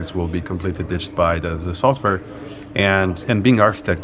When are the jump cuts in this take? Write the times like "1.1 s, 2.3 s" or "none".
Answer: none